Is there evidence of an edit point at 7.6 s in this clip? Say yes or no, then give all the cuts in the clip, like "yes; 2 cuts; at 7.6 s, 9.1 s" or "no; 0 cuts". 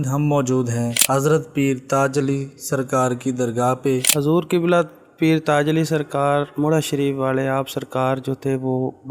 no; 2 cuts; at 1.0 s, 4.1 s